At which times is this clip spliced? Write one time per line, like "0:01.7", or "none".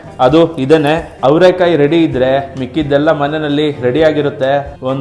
0:01.2